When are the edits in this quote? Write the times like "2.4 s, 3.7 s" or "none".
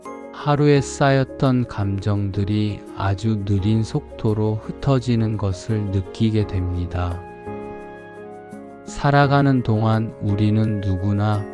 7.1 s, 8.4 s

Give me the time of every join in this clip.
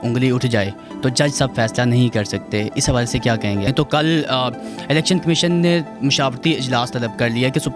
3.7 s

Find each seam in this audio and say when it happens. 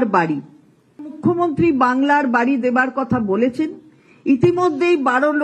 1.2 s

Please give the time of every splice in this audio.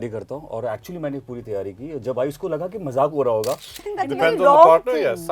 3.8 s

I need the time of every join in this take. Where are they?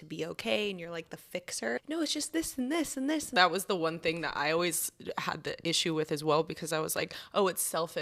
1.8 s, 3.3 s

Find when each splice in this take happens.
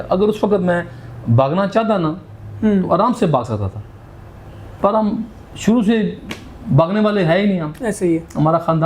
none

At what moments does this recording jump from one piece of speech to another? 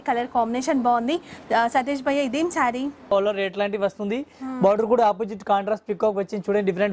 3.0 s

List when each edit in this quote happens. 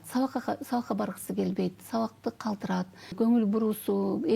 3.1 s

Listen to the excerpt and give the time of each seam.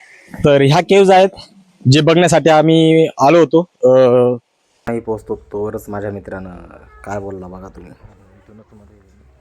4.9 s

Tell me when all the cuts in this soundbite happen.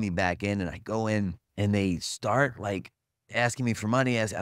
1.4 s

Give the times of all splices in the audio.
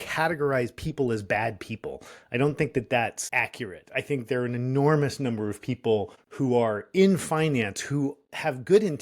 none

